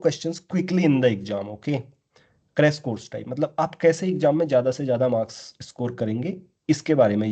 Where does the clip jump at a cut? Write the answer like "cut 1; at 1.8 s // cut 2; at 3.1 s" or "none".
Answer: none